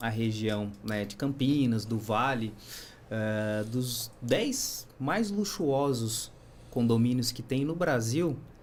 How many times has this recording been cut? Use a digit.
0